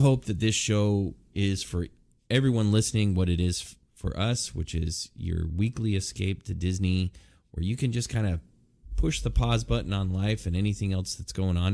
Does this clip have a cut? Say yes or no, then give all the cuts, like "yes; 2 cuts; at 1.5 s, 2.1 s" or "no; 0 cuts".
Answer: no; 0 cuts